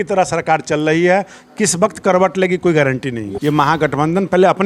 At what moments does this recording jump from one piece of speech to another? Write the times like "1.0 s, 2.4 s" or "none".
3.3 s